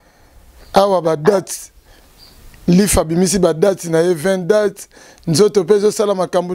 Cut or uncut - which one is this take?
uncut